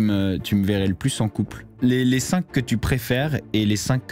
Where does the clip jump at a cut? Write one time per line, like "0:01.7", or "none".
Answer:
0:01.6